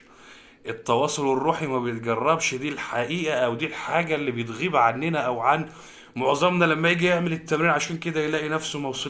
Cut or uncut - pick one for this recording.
uncut